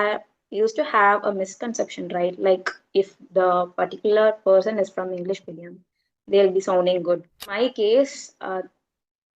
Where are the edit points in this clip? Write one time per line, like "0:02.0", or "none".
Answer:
0:07.5

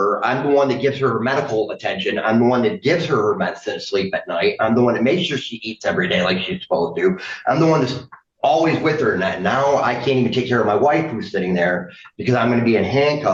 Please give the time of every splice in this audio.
none

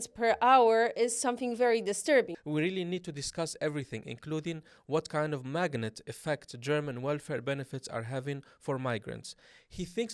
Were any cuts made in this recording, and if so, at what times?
0:02.3

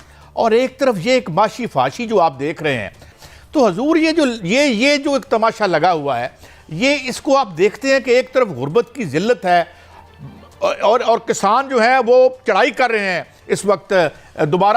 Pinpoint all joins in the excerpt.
none

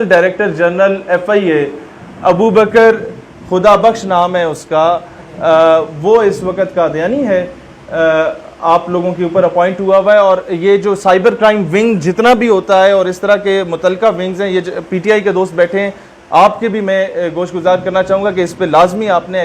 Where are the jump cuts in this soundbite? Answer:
none

